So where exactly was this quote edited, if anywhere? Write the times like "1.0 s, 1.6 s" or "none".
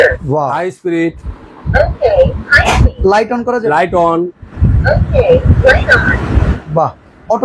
none